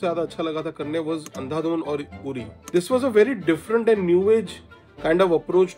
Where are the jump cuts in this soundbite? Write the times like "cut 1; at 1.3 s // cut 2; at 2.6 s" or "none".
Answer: cut 1; at 2.5 s